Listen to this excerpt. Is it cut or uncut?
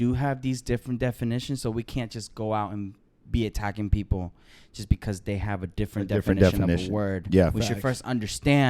uncut